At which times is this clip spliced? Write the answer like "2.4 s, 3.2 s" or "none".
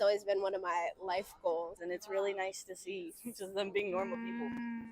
1.8 s